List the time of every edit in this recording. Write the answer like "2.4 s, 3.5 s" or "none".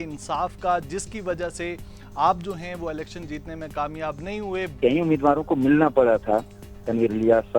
4.8 s